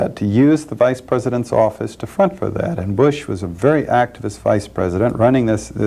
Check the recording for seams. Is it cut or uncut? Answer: cut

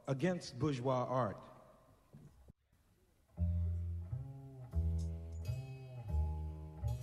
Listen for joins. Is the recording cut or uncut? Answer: uncut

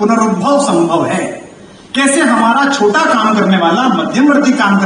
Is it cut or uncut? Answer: uncut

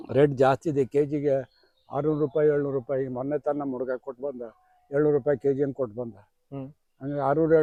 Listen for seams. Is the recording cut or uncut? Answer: uncut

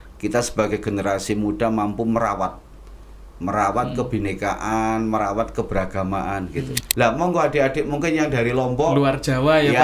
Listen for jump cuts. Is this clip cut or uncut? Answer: cut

